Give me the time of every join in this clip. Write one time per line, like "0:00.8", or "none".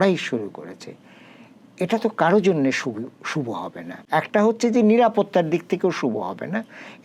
none